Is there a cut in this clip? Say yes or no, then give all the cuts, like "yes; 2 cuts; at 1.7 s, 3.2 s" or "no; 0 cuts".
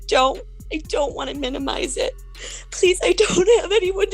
yes; 1 cut; at 2.3 s